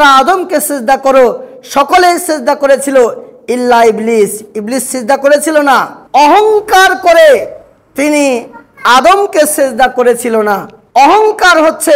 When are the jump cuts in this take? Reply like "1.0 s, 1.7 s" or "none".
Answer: 6.0 s, 10.7 s

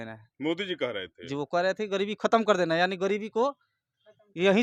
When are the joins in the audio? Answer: none

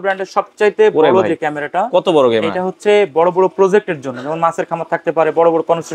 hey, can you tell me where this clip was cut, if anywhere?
none

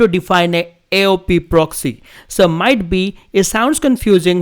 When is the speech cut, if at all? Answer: none

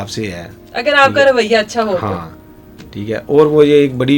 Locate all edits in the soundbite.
none

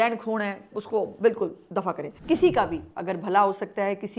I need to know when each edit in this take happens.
2.1 s

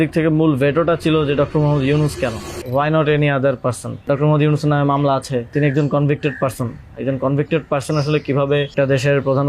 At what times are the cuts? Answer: 2.5 s, 4.0 s, 5.5 s, 8.7 s

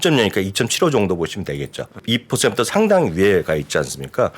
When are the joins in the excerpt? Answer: 1.9 s

